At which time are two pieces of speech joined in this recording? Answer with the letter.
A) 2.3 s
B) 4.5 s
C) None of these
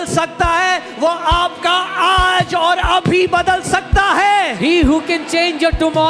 C